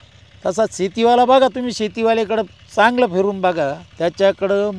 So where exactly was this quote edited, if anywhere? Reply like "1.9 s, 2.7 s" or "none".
3.8 s